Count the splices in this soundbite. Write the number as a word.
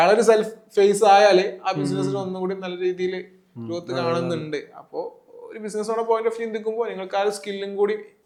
zero